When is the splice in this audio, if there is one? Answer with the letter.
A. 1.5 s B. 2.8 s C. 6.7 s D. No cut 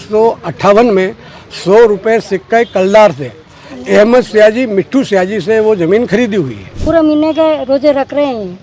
C